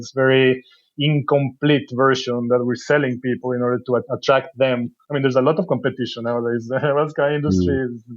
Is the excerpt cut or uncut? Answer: cut